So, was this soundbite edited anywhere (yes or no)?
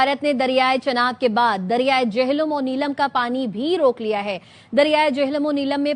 no